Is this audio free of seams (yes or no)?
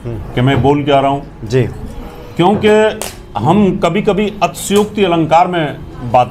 yes